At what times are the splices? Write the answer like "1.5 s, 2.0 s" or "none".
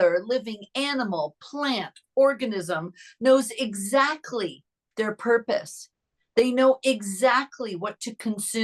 none